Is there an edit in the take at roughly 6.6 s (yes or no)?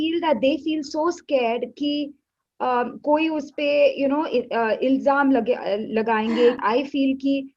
yes